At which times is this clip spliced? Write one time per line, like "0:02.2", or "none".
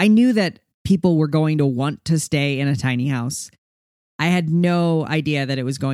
0:03.7

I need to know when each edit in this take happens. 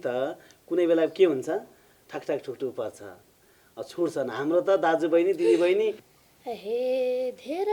0:06.1

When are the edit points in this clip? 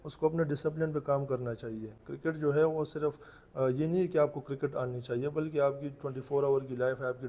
none

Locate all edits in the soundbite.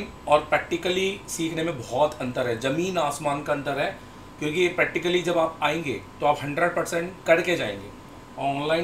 none

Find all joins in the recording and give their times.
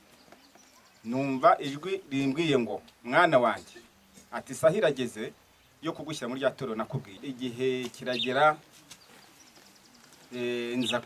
0:07.2

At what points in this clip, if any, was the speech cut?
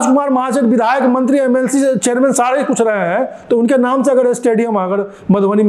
none

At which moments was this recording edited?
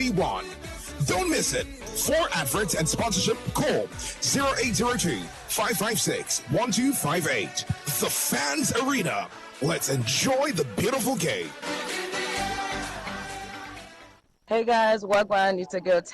0:14.1

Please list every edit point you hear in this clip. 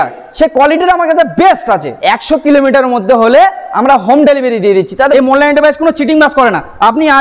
0:01.9
0:05.1

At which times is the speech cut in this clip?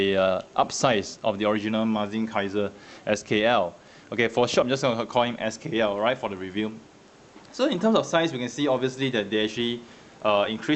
0:08.0

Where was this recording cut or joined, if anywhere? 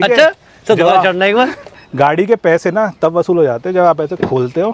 0:01.8

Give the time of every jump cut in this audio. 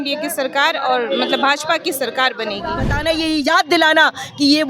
0:02.9

